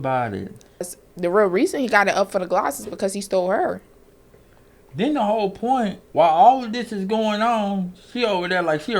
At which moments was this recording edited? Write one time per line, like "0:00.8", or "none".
0:00.9